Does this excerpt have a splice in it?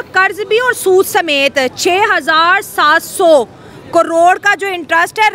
no; 0 cuts

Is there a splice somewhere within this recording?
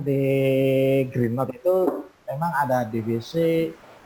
no; 0 cuts

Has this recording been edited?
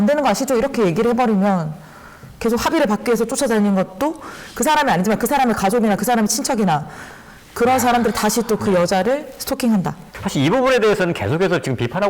yes; 1 cut; at 10.1 s

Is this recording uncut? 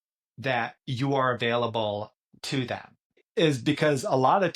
no; 1 cut; at 3.2 s

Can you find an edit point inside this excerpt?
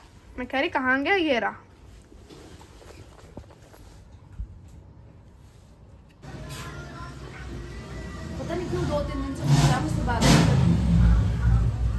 yes; 1 cut; at 6.2 s

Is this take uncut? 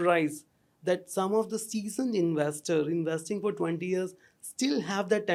yes; 0 cuts

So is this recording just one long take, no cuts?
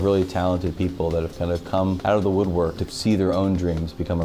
no; 2 cuts; at 2.0 s, 2.9 s

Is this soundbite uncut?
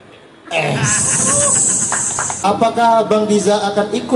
no; 1 cut; at 2.4 s

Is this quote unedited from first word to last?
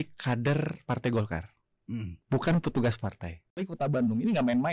no; 1 cut; at 3.7 s

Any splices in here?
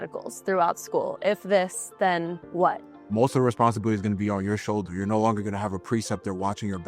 yes; 1 cut; at 2.9 s

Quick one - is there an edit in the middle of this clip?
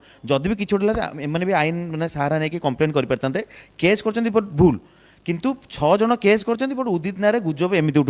no; 0 cuts

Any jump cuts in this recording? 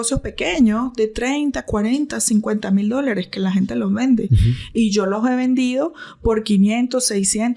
no; 0 cuts

